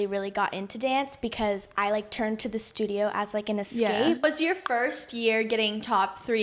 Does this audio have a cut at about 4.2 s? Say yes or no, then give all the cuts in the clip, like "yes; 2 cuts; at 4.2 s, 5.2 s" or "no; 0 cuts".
yes; 1 cut; at 4.2 s